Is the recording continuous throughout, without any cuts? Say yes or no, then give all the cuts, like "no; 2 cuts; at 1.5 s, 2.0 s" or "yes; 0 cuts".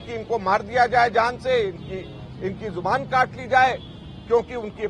yes; 0 cuts